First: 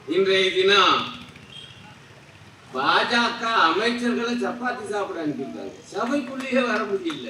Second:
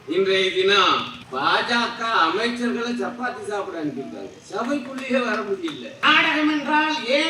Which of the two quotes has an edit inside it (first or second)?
second